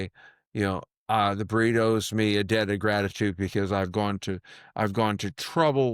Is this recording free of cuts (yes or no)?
yes